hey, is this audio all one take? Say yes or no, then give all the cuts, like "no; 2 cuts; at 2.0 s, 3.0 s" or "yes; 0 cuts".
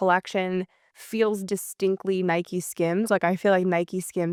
yes; 0 cuts